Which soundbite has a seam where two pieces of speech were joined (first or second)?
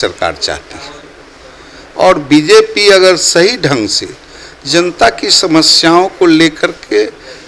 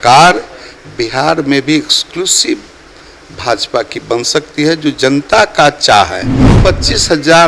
second